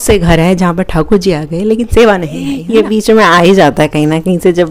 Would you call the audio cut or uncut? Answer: cut